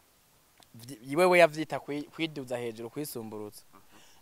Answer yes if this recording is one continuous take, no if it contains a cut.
yes